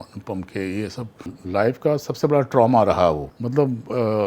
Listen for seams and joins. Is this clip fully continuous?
no; 2 cuts; at 1.3 s, 3.3 s

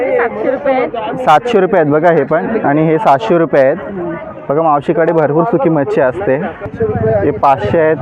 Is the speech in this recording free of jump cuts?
no; 1 cut; at 6.7 s

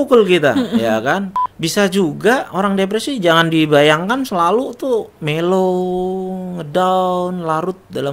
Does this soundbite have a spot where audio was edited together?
yes; 1 cut; at 1.3 s

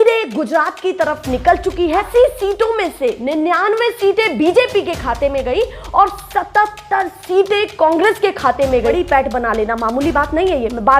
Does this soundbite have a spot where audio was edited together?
yes; 2 cuts; at 2.1 s, 8.9 s

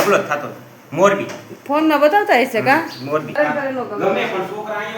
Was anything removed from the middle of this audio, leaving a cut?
yes; 1 cut; at 3.3 s

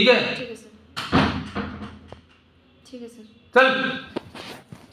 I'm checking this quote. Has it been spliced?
no; 0 cuts

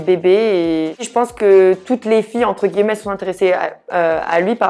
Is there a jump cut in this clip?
no; 0 cuts

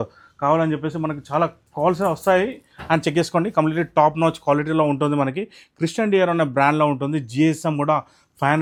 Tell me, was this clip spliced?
no; 0 cuts

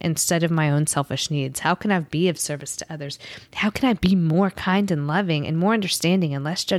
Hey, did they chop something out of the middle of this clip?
no; 0 cuts

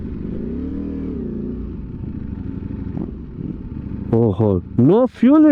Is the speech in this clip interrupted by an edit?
no; 0 cuts

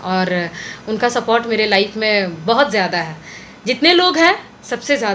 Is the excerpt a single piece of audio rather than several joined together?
yes; 0 cuts

